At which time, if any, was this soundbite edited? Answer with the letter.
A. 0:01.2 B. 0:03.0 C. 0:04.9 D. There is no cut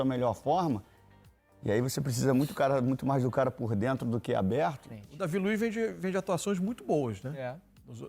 C